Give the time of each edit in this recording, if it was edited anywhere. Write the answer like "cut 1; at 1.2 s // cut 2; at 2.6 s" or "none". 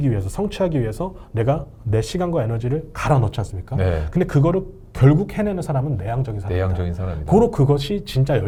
none

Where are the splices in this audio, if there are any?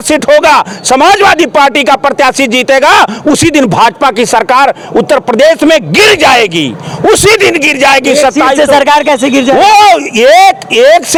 none

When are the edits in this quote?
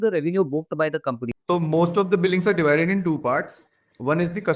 cut 1; at 1.3 s

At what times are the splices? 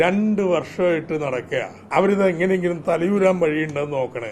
cut 1; at 1.8 s

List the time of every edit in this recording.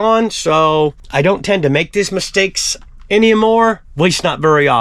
cut 1; at 1.0 s // cut 2; at 3.9 s

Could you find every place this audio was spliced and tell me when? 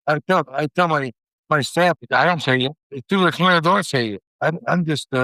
cut 1; at 2.0 s // cut 2; at 2.9 s

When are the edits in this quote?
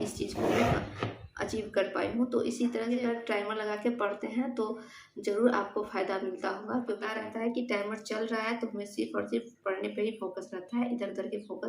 cut 1; at 3.0 s // cut 2; at 7.1 s

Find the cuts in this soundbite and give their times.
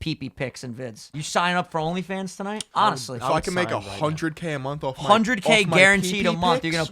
cut 1; at 1.1 s // cut 2; at 2.6 s

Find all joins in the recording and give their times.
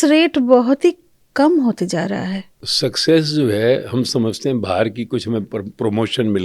cut 1; at 2.6 s

